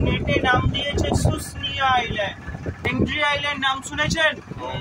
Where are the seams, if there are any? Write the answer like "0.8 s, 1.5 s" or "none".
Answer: 2.9 s